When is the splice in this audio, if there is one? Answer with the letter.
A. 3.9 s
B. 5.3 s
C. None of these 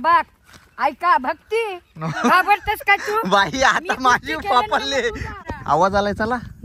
B